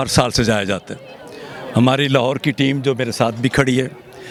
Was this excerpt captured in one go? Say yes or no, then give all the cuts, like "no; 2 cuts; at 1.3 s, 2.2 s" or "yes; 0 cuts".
yes; 0 cuts